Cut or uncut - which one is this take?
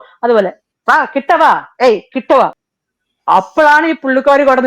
cut